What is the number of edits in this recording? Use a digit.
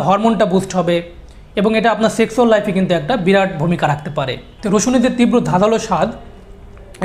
1